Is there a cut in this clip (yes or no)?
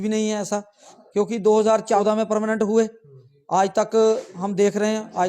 yes